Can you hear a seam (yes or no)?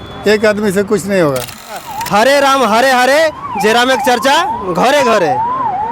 yes